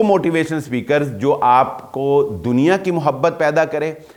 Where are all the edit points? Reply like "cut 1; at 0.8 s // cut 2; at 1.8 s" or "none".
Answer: none